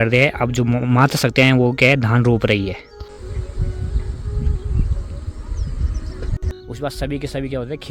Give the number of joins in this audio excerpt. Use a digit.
2